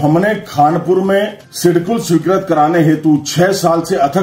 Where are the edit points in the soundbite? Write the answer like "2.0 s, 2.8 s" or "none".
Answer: 1.4 s

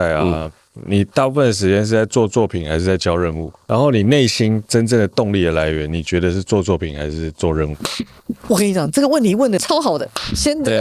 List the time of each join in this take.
3.5 s, 9.6 s

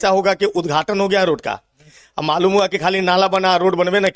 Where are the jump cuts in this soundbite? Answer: none

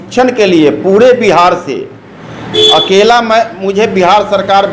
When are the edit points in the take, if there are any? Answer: none

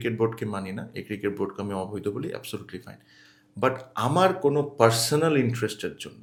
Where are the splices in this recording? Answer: none

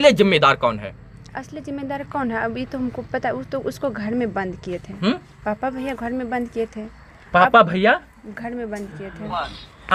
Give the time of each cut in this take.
none

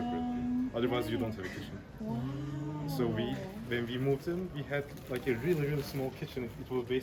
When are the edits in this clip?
none

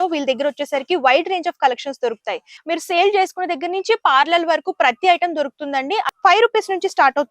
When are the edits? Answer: 2.5 s, 6.1 s

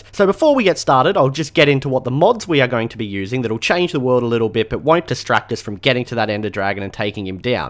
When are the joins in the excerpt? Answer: 6.7 s

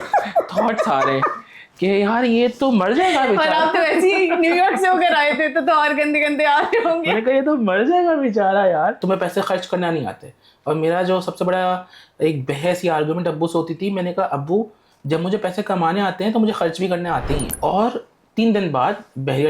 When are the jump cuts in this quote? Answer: 9.0 s, 17.5 s

